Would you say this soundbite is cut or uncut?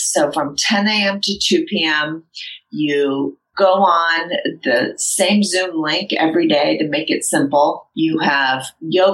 cut